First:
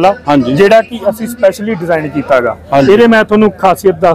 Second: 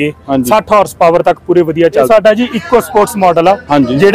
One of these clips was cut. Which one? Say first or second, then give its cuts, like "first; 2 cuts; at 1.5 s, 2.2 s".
second; 1 cut; at 2.1 s